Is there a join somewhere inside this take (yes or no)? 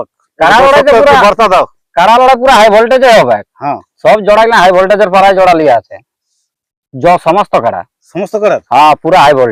no